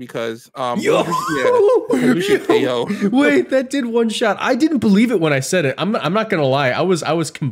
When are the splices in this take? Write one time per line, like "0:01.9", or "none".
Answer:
none